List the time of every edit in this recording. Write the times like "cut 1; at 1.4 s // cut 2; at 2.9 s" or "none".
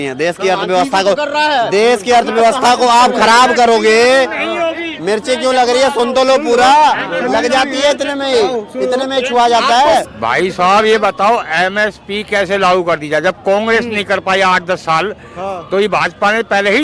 cut 1; at 10.0 s